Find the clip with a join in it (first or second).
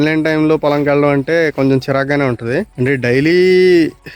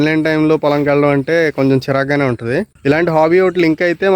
second